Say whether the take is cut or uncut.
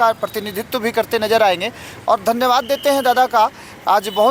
uncut